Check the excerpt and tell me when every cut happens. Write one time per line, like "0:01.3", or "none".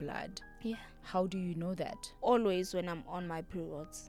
0:02.0